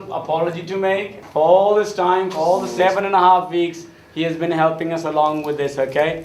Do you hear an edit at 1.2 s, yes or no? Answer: yes